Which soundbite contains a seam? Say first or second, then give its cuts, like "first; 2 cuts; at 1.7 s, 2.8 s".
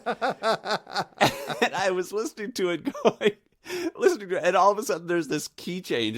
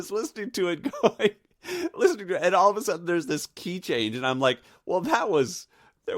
first; 1 cut; at 1.1 s